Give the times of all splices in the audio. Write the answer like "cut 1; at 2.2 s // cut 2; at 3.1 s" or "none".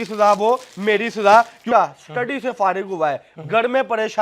cut 1; at 1.6 s